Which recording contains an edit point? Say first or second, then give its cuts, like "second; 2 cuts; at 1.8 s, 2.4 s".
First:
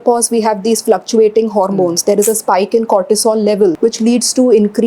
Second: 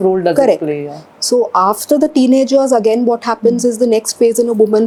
first; 1 cut; at 3.8 s